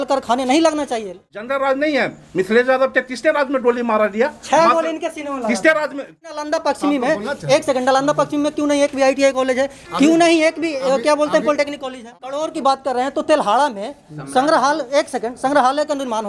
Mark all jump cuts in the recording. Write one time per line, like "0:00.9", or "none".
0:01.1
0:06.4
0:12.1